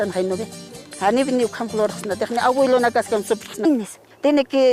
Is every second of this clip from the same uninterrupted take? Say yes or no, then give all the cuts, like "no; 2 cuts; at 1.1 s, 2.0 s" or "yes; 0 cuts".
yes; 0 cuts